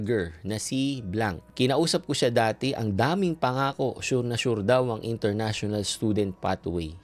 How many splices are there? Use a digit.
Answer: 1